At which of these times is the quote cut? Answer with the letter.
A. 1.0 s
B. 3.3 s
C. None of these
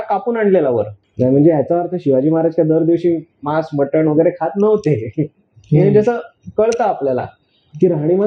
A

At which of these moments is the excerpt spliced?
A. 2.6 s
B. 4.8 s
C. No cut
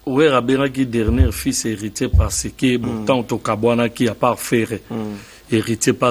C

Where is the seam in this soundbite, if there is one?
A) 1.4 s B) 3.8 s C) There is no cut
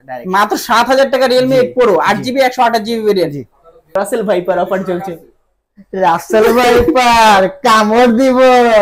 B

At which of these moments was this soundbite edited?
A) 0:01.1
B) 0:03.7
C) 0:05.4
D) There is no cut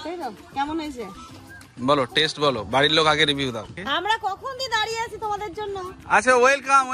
B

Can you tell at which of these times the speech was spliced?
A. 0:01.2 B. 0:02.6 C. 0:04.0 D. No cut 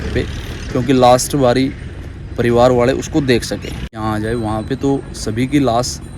C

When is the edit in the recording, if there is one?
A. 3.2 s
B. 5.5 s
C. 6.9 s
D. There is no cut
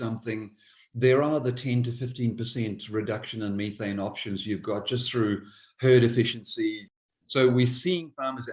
C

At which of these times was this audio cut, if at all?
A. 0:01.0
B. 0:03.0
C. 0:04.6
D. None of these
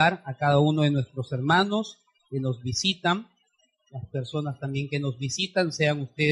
D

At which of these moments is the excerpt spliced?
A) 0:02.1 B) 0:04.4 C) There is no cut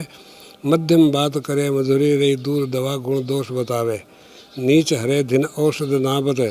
C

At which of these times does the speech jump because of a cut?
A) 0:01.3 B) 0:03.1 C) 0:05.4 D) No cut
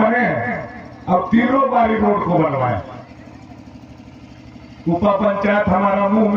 B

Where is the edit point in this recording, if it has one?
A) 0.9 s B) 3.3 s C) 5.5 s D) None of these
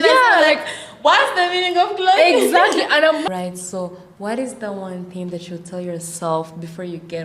B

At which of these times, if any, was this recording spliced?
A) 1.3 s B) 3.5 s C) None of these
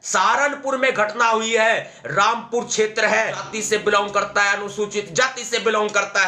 B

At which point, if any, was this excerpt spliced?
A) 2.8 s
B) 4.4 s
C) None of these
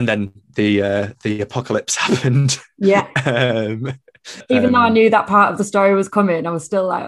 B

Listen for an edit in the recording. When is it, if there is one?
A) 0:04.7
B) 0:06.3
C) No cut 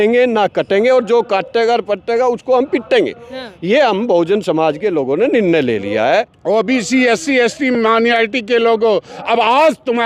B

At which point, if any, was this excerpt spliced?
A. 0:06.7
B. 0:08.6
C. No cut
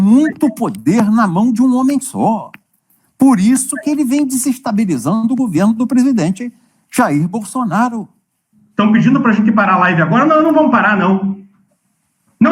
B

